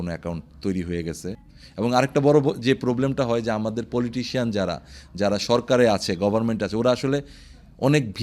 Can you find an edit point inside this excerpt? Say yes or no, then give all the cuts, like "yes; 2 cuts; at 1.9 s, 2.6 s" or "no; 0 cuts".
yes; 1 cut; at 1.4 s